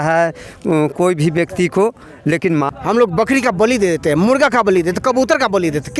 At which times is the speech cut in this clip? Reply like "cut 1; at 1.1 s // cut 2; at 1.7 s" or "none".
cut 1; at 2.3 s